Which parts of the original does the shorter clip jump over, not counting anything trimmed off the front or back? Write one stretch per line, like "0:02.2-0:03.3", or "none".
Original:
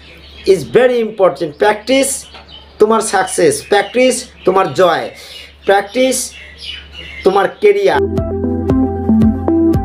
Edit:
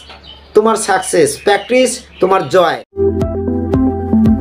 0:05.2-0:08.0